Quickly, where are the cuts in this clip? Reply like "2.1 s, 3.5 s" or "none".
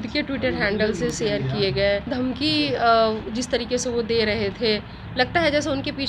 2.1 s